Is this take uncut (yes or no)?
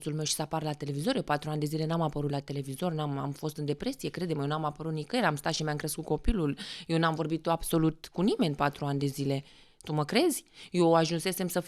yes